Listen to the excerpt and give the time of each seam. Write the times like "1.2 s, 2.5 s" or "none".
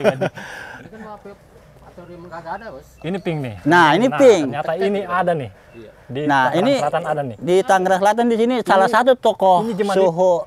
none